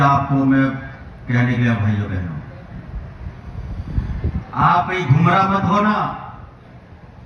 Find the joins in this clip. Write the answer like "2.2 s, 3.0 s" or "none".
none